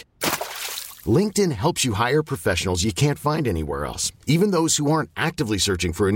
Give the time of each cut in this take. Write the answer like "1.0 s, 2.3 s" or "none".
none